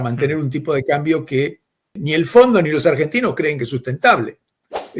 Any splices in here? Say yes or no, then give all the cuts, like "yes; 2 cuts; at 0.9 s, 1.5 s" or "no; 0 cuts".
yes; 1 cut; at 2.0 s